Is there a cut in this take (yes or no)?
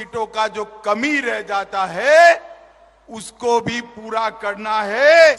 no